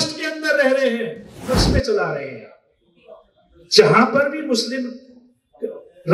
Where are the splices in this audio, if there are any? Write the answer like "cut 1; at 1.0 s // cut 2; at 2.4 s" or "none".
cut 1; at 1.4 s